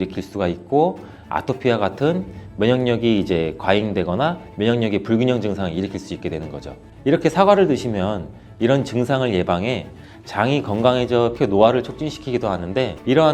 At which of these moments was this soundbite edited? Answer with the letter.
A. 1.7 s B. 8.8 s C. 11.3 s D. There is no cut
C